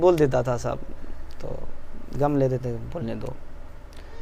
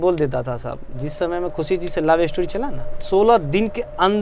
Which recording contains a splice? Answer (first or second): second